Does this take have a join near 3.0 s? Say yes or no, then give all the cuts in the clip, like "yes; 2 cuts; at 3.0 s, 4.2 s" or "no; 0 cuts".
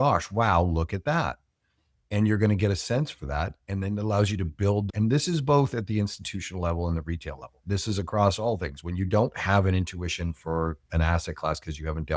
no; 1 cut; at 4.8 s